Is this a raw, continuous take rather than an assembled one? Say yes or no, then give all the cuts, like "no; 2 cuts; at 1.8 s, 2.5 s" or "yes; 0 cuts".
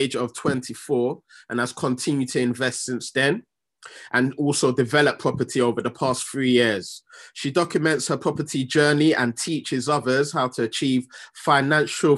yes; 0 cuts